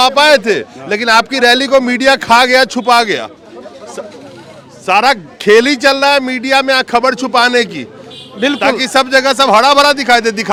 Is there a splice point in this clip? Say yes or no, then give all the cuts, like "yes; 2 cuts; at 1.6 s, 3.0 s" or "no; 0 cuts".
no; 0 cuts